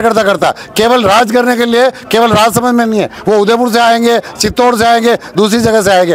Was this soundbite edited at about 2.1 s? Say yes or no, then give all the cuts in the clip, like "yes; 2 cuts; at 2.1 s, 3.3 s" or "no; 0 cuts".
no; 0 cuts